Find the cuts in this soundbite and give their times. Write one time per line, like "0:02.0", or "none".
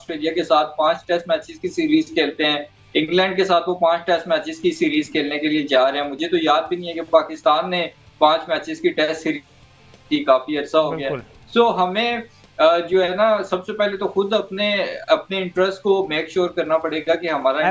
none